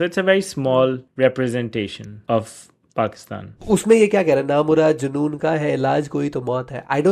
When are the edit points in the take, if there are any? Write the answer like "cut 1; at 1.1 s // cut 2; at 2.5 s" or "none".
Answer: cut 1; at 1.1 s // cut 2; at 2.1 s // cut 3; at 3.5 s